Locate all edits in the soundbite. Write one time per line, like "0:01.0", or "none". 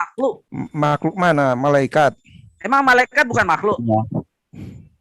none